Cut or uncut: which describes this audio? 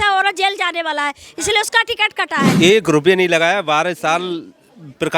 cut